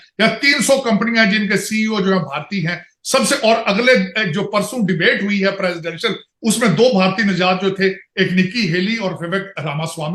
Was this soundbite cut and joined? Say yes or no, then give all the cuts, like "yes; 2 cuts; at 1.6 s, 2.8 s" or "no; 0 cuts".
no; 0 cuts